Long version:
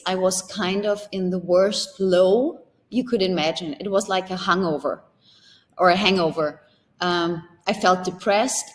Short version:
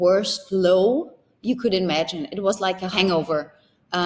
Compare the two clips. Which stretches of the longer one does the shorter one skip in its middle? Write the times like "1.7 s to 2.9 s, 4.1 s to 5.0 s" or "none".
4.4 s to 6.0 s